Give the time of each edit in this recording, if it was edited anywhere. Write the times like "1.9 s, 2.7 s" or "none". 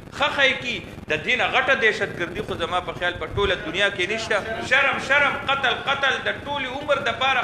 4.6 s